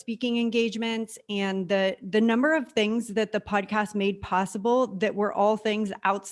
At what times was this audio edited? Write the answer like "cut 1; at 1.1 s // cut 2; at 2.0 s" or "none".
none